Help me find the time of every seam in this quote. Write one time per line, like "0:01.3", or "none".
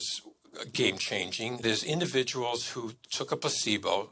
0:01.6
0:03.1